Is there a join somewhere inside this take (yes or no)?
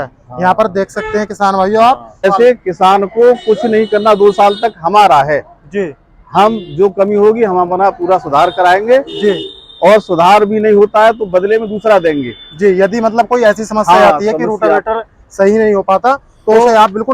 yes